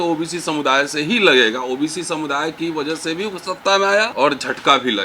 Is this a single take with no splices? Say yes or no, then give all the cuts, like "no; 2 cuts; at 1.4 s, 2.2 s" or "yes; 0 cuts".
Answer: no; 1 cut; at 4.1 s